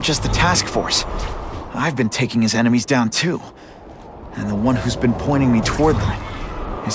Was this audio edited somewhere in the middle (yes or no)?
no